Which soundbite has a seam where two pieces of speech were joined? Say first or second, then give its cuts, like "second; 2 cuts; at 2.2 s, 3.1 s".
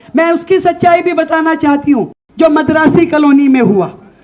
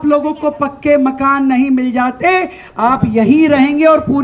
first; 1 cut; at 2.2 s